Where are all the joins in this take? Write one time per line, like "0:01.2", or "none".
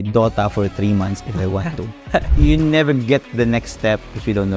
0:02.3